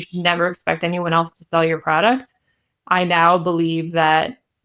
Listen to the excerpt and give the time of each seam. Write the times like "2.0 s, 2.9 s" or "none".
none